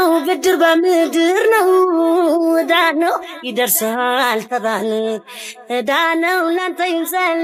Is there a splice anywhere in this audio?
no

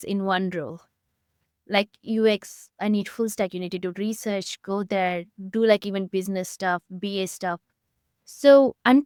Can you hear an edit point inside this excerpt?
no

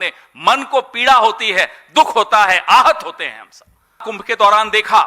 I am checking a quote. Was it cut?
yes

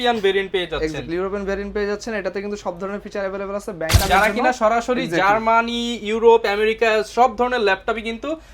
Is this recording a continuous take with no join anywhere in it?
no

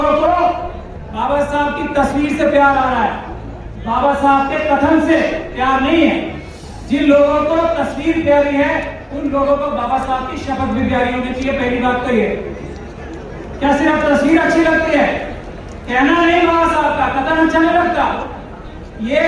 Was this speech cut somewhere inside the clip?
no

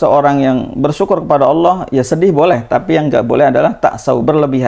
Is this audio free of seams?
yes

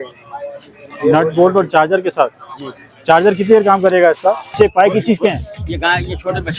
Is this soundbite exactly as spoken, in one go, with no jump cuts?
no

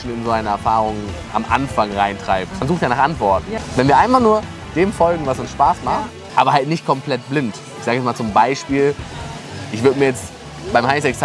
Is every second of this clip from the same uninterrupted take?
no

